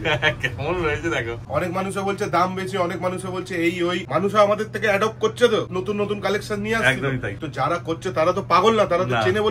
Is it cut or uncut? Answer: cut